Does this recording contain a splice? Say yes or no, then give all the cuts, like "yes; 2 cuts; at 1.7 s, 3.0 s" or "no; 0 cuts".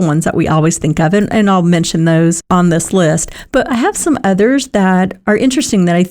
yes; 2 cuts; at 2.4 s, 5.2 s